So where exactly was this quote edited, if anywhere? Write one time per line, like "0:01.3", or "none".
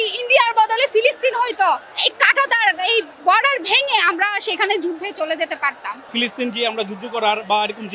0:01.9
0:06.0